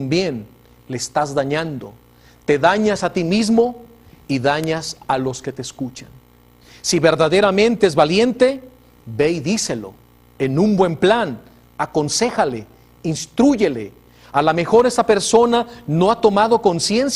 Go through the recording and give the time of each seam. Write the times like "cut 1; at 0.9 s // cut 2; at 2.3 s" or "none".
cut 1; at 7.8 s